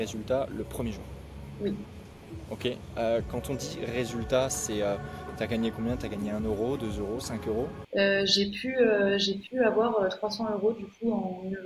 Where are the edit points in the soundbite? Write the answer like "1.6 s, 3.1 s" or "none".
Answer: 7.8 s